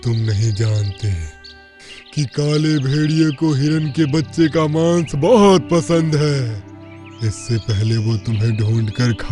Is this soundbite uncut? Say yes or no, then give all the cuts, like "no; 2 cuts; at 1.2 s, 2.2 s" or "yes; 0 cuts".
yes; 0 cuts